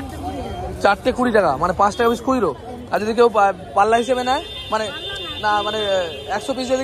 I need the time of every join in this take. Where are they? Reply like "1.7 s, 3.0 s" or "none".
none